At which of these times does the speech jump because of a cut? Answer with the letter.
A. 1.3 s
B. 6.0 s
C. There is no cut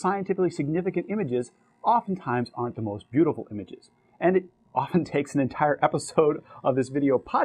A